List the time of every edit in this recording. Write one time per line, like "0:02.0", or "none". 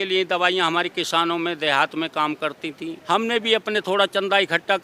0:02.9